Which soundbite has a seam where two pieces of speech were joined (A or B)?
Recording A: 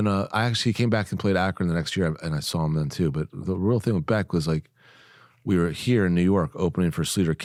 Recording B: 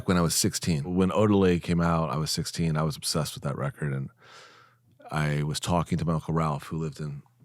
B